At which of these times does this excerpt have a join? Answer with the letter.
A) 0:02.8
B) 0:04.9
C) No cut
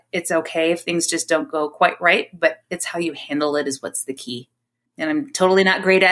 C